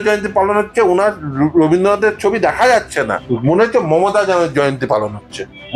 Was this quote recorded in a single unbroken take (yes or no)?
no